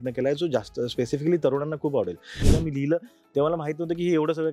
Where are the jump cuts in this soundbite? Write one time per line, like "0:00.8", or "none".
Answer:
0:02.5